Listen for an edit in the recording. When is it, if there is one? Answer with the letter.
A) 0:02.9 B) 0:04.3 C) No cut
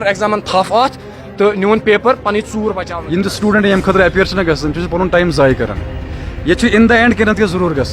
A